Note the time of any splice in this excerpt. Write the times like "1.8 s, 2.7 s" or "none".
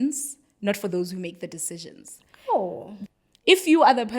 2.9 s

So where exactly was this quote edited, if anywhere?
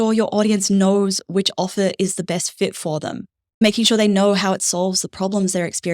3.6 s

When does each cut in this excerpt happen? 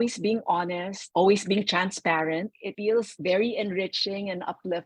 0.9 s, 2.9 s

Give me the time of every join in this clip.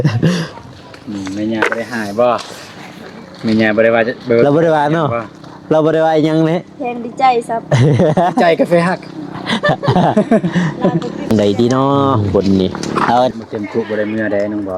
11.3 s

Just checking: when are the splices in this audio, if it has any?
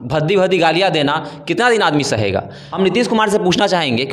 2.6 s

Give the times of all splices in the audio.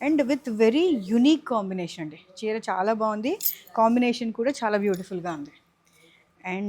none

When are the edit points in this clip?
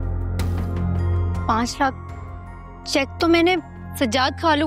1.1 s, 3.8 s

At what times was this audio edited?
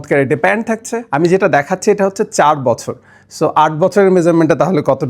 1.0 s

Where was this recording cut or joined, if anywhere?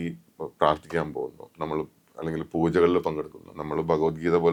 none

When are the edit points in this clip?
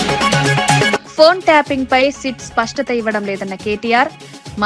none

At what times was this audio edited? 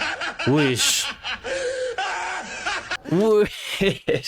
2.9 s

